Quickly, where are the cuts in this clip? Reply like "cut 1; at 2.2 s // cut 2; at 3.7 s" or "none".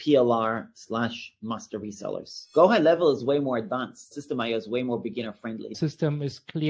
cut 1; at 2.4 s // cut 2; at 4.1 s // cut 3; at 5.7 s